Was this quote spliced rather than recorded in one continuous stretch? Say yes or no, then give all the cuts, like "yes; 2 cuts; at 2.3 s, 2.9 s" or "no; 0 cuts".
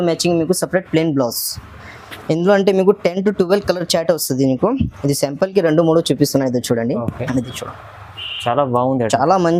no; 0 cuts